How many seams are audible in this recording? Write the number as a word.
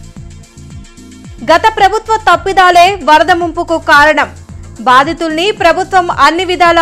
one